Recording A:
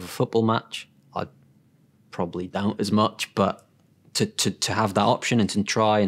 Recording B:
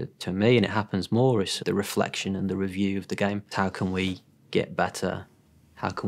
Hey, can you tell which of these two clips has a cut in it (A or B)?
B